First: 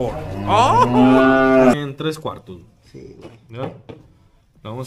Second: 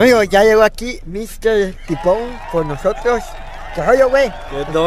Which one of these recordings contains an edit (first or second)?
first